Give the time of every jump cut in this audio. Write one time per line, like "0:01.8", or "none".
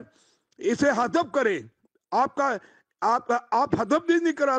none

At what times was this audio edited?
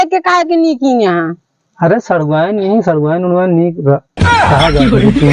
none

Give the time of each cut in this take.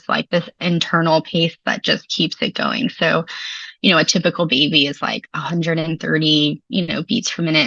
none

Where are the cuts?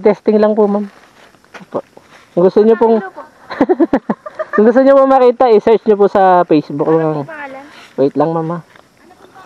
0:02.8

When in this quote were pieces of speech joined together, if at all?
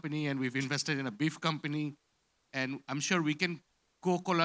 none

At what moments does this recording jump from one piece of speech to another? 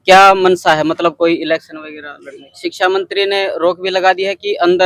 0:02.5

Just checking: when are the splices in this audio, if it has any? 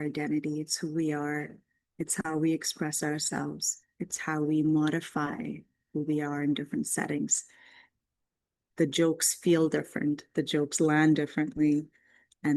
0:08.6

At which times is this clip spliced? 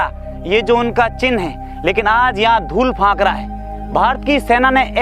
none

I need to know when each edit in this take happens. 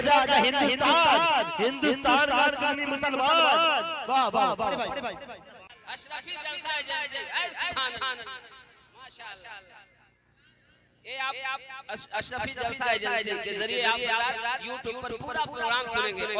0:05.7

